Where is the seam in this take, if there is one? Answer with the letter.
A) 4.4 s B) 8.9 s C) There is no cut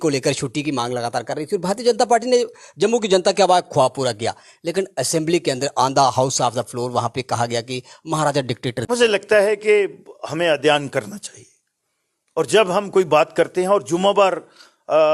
B